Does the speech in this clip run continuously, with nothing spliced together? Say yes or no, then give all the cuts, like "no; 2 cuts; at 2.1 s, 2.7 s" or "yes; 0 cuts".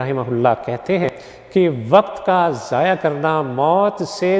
no; 1 cut; at 1.0 s